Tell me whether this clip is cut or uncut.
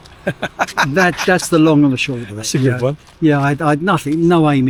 uncut